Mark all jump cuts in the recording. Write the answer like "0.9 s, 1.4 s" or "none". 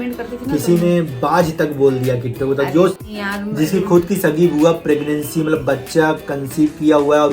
2.9 s